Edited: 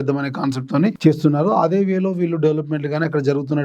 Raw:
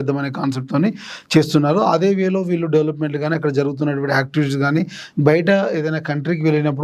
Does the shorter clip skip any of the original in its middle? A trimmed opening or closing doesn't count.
yes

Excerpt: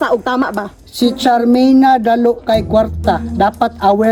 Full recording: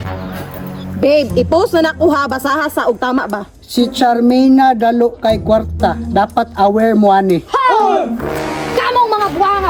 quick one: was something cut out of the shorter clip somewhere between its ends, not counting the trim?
no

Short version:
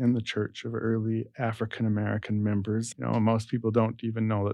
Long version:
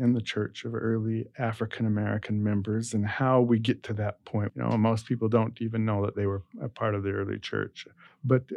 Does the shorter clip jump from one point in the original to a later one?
yes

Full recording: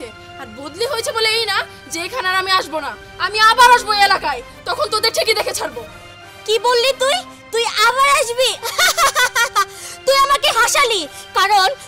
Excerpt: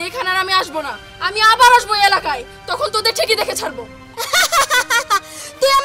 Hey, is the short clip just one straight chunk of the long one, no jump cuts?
no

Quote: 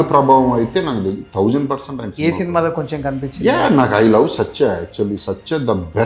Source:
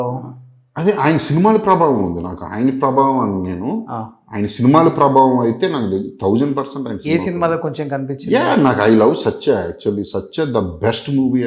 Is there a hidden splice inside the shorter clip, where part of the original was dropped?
no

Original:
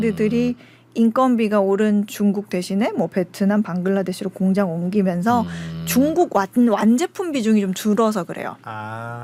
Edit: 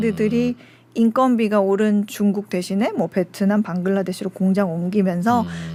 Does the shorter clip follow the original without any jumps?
yes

